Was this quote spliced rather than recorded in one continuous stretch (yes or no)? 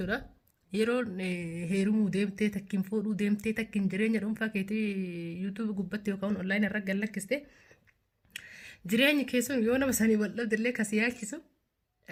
no